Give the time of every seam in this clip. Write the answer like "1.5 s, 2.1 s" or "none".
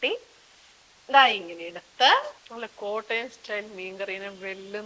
2.3 s